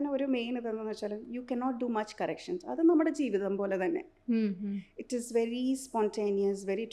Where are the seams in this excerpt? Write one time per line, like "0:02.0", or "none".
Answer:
none